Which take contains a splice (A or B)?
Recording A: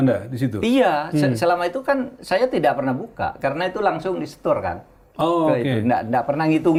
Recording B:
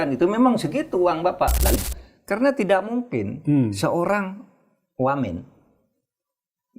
B